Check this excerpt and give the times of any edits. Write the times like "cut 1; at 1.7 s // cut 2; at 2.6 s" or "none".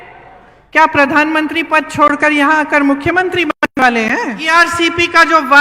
cut 1; at 4.4 s